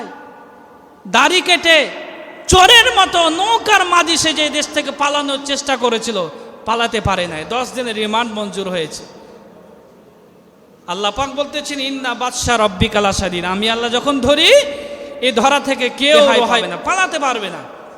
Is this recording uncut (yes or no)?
no